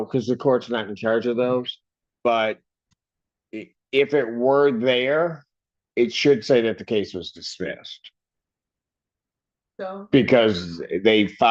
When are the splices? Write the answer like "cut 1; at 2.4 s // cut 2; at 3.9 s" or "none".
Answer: none